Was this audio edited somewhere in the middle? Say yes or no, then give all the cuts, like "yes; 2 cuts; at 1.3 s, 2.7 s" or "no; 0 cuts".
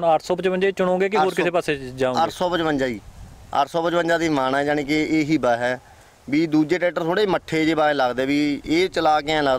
no; 0 cuts